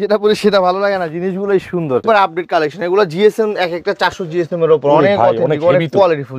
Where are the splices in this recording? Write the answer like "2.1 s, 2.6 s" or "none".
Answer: 2.0 s